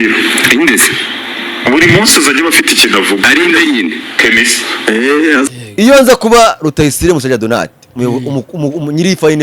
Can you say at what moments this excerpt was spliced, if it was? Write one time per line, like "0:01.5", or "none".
0:05.5